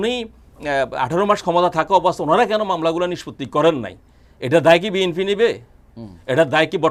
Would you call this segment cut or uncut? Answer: uncut